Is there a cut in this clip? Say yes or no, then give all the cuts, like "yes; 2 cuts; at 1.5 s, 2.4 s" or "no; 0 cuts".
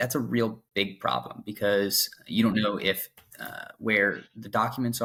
no; 0 cuts